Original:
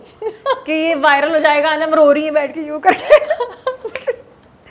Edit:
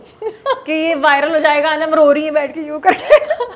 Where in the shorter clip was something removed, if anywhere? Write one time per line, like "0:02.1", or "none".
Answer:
none

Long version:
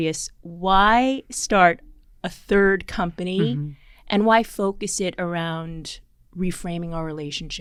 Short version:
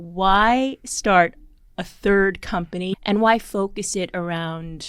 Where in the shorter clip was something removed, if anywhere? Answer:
0:02.9

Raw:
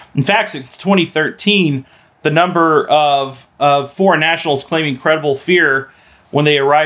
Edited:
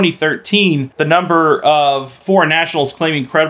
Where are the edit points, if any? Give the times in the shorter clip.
0:00.9
0:02.2

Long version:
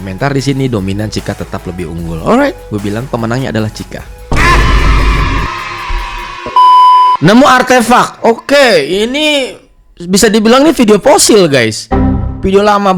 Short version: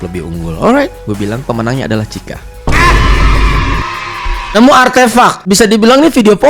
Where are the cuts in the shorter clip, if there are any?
0:04.5
0:05.4

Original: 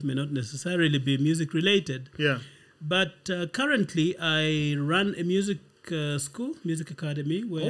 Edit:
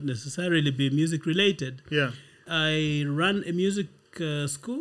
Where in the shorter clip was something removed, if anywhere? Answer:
0:02.5

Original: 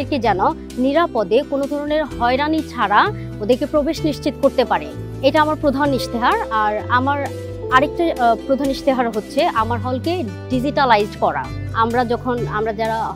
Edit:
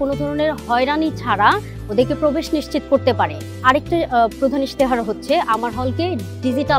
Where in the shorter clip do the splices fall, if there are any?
0:03.5

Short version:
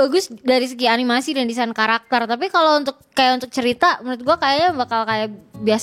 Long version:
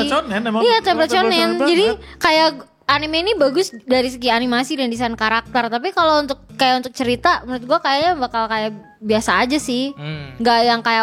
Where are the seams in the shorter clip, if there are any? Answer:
none

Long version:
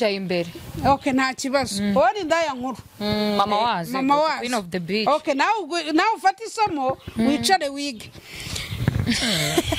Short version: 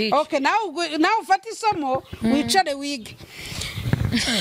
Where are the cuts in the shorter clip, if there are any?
none

